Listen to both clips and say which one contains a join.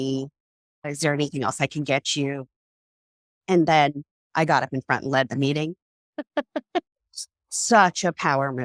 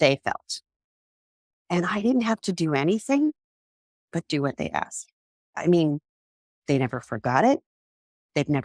second; 1 cut; at 5.5 s

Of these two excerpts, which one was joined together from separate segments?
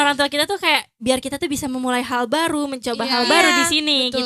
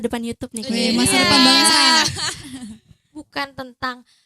second; 1 cut; at 3.2 s

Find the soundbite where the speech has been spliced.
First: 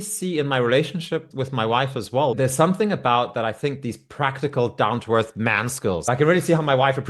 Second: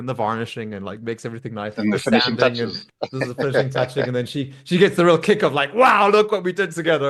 first; 3 cuts; at 1.3 s, 2.3 s, 6.0 s

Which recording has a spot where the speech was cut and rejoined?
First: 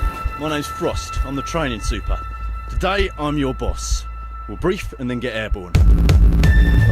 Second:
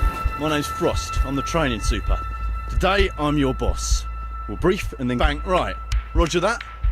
first; 1 cut; at 5.2 s

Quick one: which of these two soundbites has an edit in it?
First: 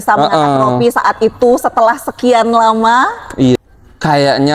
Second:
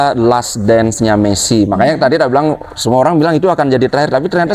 first; 1 cut; at 3.6 s

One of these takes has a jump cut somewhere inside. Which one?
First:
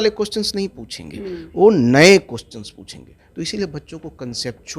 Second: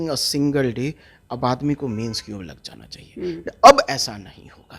second; 1 cut; at 3.4 s

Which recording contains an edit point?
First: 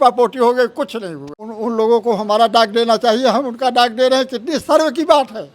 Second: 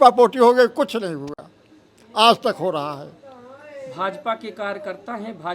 first; 1 cut; at 1.4 s

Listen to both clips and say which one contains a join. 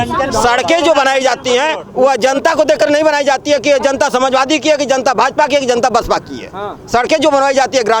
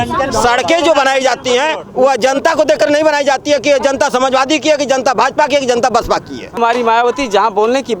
second; 1 cut; at 6.6 s

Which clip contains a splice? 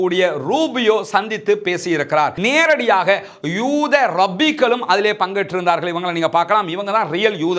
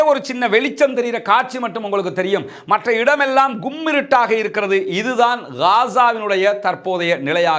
first; 1 cut; at 2.4 s

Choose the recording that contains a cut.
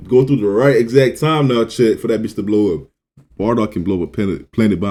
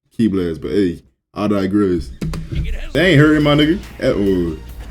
second; 1 cut; at 2.8 s

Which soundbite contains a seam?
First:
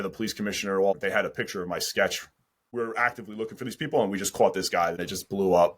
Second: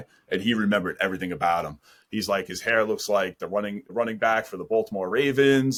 first; 3 cuts; at 0.9 s, 2.6 s, 5.0 s

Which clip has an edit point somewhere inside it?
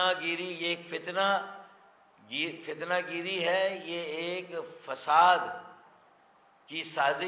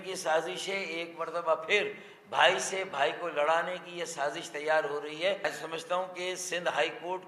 second; 1 cut; at 5.4 s

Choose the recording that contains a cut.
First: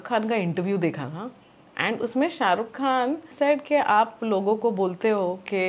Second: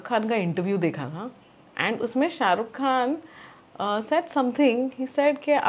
first; 1 cut; at 3.3 s

